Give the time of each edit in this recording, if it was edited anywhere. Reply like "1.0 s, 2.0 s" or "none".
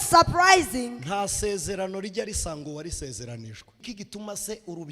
3.8 s